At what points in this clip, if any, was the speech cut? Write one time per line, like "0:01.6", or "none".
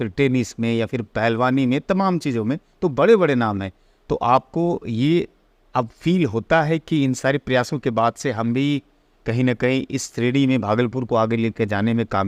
none